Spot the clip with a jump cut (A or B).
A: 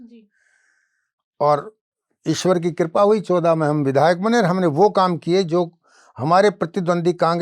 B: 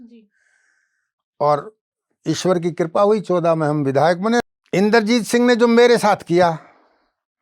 B